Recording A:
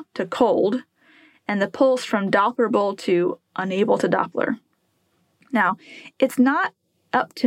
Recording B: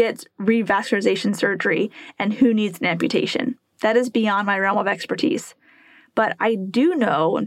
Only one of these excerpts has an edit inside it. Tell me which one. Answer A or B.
A